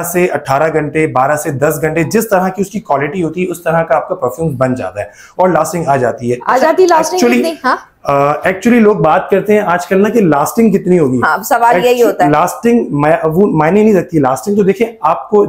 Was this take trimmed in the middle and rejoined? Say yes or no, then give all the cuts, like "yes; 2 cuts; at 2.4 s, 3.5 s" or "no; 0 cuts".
no; 0 cuts